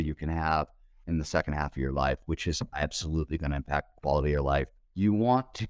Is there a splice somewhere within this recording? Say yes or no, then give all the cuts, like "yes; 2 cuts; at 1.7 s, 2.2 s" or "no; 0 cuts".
yes; 2 cuts; at 1.0 s, 4.8 s